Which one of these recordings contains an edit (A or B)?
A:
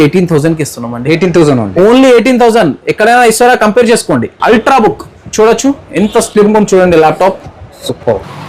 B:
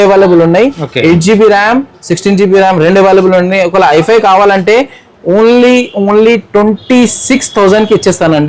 A